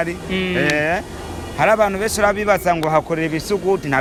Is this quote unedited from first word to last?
yes; 0 cuts

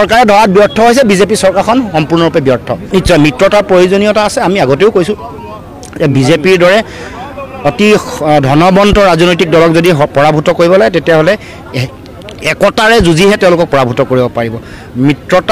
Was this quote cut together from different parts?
no; 0 cuts

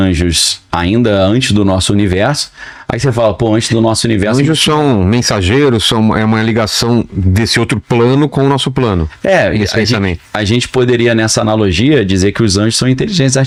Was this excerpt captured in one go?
yes; 0 cuts

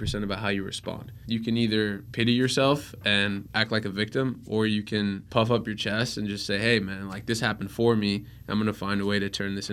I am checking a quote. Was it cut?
yes; 4 cuts; at 1.1 s, 2.0 s, 3.5 s, 5.2 s

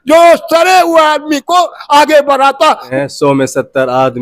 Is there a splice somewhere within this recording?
yes; 1 cut; at 2.9 s

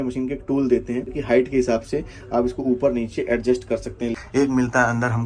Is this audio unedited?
no; 2 cuts; at 1.1 s, 4.2 s

